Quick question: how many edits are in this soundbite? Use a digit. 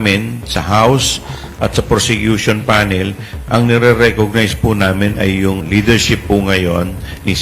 1